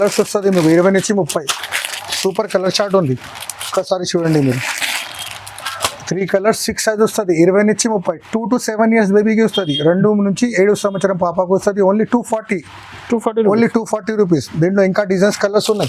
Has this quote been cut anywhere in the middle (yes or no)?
no